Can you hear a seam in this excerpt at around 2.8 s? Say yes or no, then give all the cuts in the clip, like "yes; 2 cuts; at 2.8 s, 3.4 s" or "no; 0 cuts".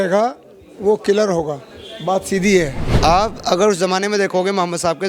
yes; 1 cut; at 2.8 s